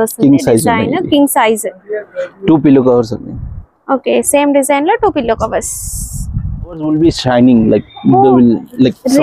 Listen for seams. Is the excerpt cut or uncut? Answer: cut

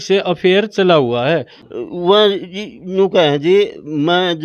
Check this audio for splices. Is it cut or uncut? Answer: cut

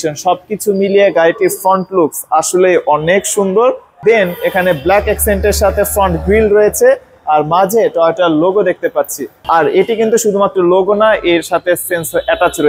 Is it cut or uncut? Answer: uncut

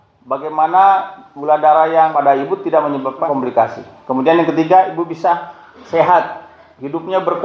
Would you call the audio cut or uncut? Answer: cut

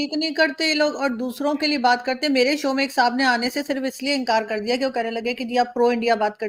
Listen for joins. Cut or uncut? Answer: uncut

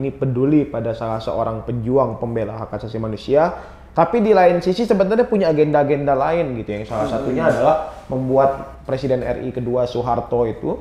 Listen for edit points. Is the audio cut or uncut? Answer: uncut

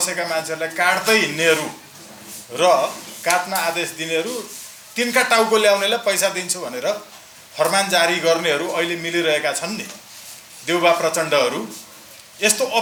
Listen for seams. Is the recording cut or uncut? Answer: uncut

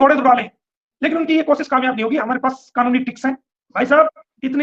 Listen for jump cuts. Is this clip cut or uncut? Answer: cut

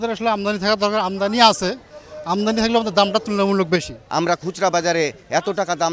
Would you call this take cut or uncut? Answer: cut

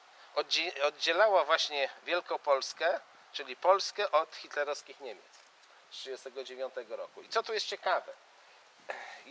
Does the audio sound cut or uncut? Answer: cut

